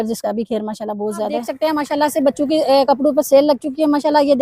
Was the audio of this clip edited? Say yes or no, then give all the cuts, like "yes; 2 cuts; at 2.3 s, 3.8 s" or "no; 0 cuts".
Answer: yes; 1 cut; at 1.5 s